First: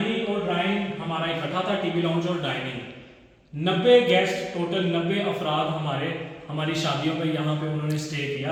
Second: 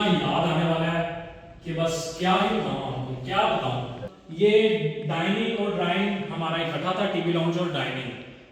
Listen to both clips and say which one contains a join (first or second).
second